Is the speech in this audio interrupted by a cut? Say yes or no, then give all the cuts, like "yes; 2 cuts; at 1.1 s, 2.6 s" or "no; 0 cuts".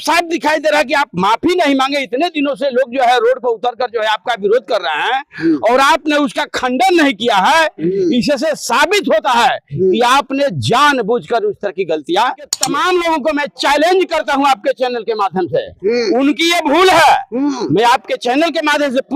yes; 1 cut; at 12.6 s